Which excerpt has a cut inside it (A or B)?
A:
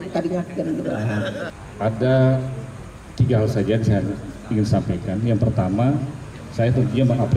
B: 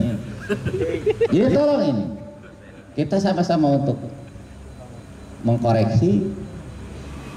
A